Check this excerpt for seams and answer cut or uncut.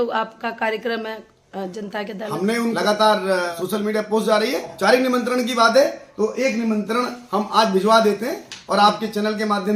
cut